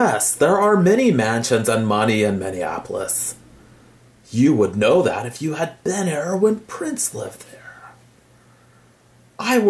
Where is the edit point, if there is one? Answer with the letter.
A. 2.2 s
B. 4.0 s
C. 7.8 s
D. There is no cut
D